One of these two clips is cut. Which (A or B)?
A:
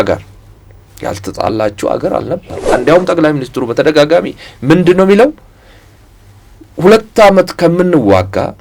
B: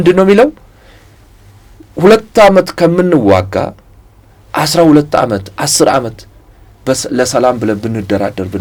A